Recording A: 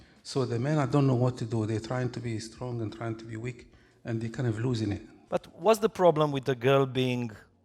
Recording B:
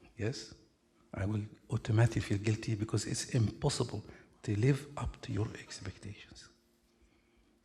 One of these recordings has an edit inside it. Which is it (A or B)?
A